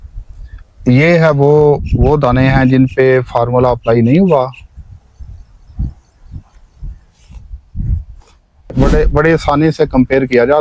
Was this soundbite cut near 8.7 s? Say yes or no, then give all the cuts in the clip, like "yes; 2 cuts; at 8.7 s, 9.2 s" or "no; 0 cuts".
yes; 1 cut; at 8.7 s